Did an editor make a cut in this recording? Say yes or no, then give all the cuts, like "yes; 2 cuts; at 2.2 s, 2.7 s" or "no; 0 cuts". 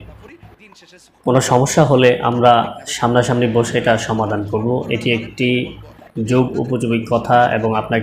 no; 0 cuts